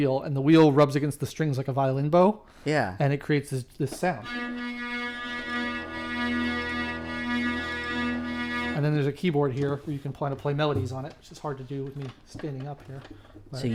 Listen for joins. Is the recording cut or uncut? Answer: uncut